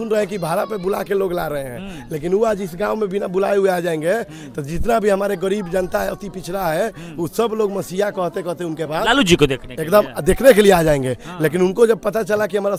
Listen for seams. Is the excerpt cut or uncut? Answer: uncut